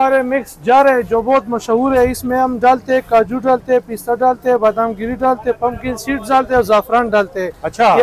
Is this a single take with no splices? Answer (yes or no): yes